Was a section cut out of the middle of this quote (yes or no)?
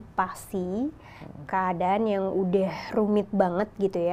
no